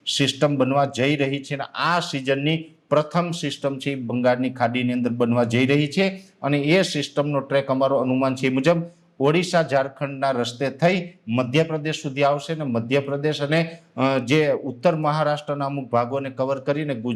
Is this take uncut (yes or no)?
yes